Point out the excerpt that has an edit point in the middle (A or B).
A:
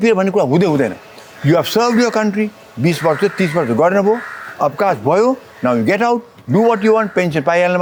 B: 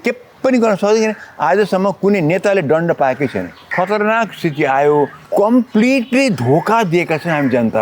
B